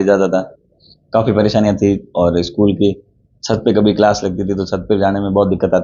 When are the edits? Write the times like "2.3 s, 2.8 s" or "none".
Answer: none